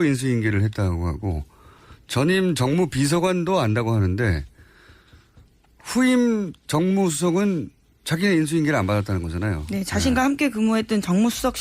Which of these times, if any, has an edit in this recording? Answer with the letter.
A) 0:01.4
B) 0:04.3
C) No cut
B